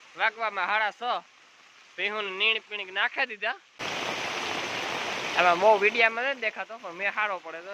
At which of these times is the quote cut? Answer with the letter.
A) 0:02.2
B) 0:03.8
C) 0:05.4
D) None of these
B